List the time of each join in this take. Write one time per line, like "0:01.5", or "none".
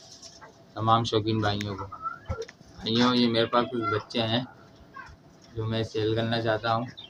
none